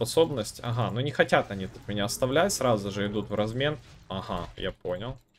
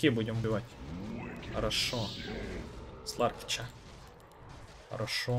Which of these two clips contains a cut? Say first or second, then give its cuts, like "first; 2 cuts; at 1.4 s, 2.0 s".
second; 1 cut; at 2.6 s